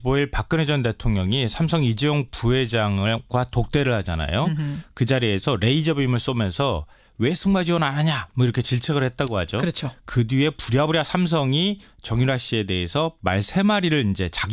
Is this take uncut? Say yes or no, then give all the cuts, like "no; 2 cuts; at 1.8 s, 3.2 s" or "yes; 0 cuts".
no; 1 cut; at 11.1 s